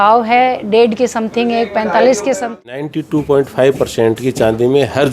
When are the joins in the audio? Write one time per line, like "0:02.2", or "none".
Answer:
0:02.8